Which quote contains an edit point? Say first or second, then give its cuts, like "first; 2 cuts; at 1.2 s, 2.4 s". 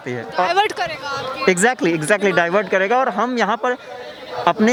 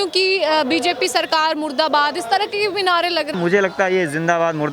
second; 1 cut; at 3.3 s